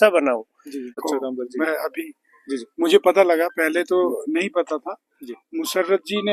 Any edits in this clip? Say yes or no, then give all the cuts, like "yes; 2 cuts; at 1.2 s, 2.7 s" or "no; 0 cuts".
yes; 1 cut; at 0.9 s